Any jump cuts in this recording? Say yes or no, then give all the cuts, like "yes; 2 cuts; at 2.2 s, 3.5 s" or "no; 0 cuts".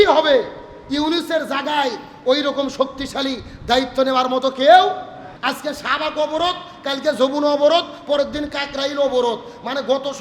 yes; 1 cut; at 5.3 s